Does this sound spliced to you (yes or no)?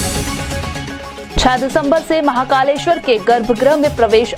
no